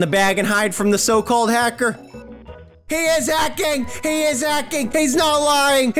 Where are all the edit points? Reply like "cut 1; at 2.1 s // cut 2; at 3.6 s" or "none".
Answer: none